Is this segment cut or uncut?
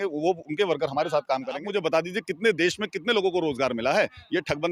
cut